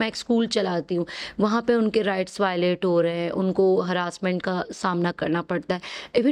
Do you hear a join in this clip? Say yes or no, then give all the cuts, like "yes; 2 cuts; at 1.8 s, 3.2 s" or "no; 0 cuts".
no; 0 cuts